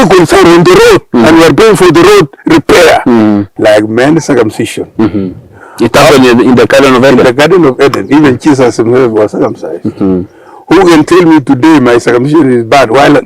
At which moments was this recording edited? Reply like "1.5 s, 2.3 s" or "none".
3.5 s